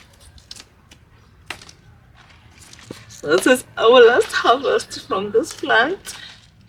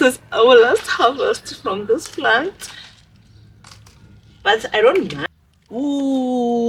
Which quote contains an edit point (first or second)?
second